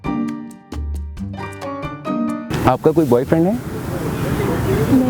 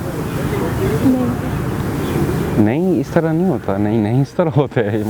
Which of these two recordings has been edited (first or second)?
first